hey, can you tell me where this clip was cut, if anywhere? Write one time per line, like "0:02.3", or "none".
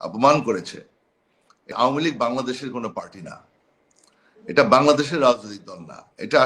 0:01.7